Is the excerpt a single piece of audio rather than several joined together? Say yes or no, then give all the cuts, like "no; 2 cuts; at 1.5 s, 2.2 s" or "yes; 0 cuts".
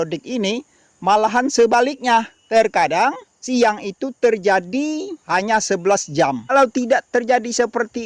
no; 4 cuts; at 2.4 s, 3.3 s, 5.1 s, 6.5 s